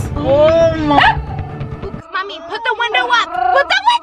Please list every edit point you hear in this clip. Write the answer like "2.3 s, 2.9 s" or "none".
none